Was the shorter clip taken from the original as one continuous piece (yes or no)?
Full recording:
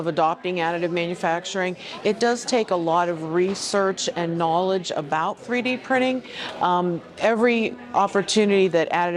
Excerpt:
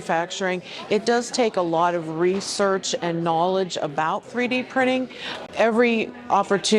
no